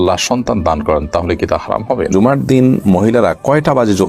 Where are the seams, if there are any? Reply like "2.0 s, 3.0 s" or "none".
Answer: 2.1 s